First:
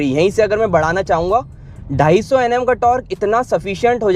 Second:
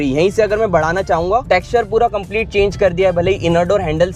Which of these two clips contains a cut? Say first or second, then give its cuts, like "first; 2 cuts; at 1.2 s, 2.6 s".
second; 1 cut; at 1.4 s